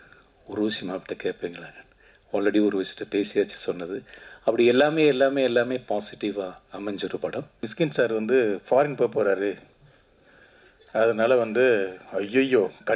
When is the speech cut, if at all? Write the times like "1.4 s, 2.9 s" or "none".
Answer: 7.7 s